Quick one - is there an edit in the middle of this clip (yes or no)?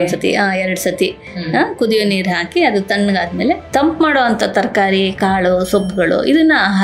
yes